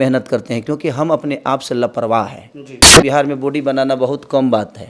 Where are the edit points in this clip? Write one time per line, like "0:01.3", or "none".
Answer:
0:03.0